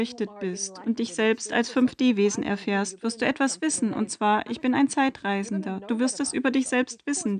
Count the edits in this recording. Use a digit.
0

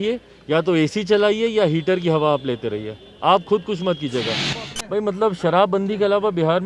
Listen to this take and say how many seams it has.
1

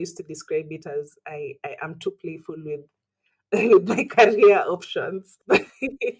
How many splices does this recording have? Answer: 1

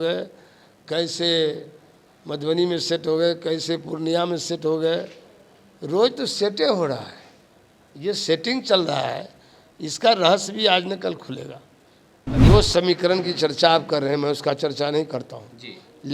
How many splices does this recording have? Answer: 1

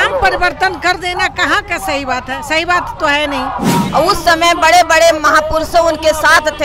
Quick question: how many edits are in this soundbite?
1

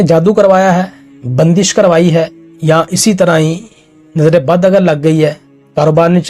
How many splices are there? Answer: 1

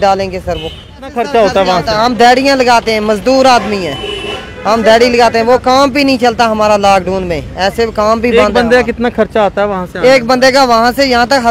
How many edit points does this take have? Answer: 1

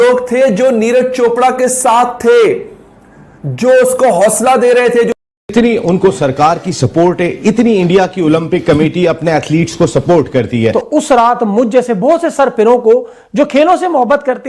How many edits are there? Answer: 2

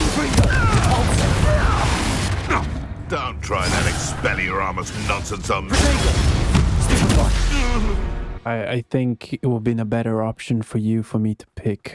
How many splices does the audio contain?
0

